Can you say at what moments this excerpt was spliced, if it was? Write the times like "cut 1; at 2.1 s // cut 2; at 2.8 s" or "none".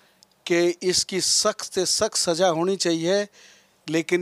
none